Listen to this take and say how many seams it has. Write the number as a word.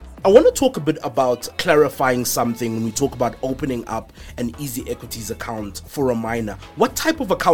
one